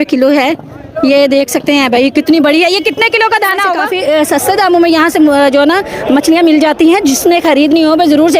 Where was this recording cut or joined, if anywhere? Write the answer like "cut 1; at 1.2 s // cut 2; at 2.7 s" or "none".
cut 1; at 3.9 s